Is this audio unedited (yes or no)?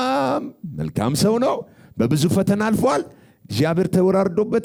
yes